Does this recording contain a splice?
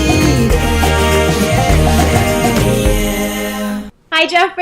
yes; 1 cut; at 3.7 s

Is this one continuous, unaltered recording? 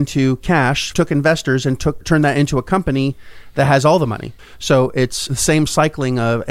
no; 1 cut; at 4.4 s

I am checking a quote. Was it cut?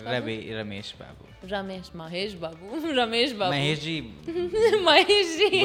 no; 0 cuts

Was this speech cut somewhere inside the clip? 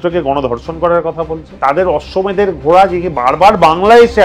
yes; 1 cut; at 1.5 s

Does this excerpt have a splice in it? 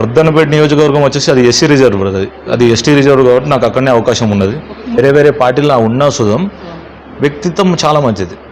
yes; 1 cut; at 5.0 s

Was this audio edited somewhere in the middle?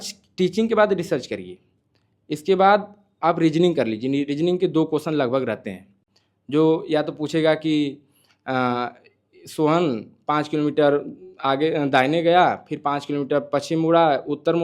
no; 0 cuts

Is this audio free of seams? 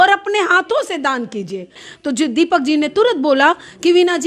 no; 1 cut; at 1.8 s

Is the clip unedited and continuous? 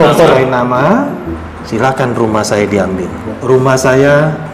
no; 2 cuts; at 1.3 s, 3.3 s

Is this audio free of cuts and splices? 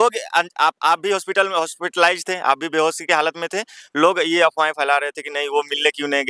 yes; 0 cuts

